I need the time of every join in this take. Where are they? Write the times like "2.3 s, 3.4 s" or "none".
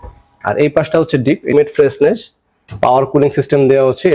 1.5 s